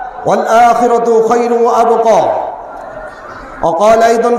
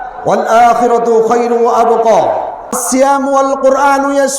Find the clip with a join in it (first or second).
second